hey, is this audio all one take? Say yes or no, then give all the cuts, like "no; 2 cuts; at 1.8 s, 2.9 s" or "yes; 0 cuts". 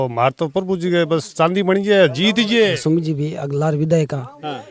no; 1 cut; at 2.7 s